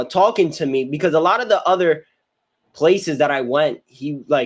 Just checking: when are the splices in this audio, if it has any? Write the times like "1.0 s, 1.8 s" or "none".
none